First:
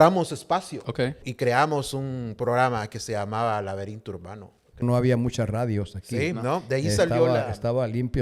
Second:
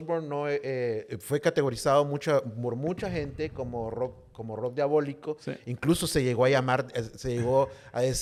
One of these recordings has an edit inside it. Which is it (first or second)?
first